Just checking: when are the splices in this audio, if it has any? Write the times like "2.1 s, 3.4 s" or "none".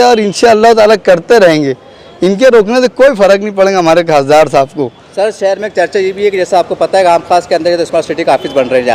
none